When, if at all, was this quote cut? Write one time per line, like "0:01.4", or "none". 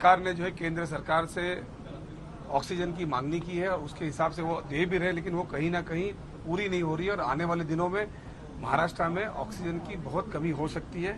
0:03.2